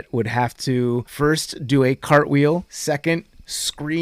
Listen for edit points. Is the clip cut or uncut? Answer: cut